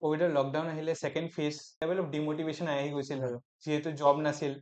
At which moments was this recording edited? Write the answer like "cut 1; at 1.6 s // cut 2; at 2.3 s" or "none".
cut 1; at 1.7 s